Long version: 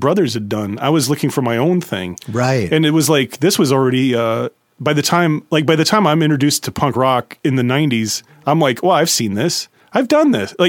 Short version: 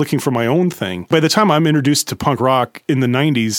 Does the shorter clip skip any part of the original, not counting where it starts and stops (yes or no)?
yes